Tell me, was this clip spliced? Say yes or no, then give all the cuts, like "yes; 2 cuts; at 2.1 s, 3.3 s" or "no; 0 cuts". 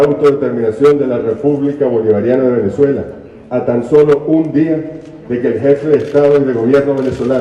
no; 0 cuts